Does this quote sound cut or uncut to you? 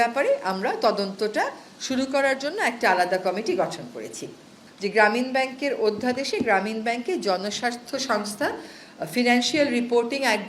cut